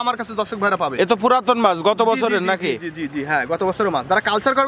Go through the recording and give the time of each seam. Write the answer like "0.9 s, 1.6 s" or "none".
none